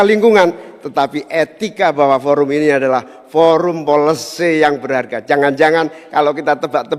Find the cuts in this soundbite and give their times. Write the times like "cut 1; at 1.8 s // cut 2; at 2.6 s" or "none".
none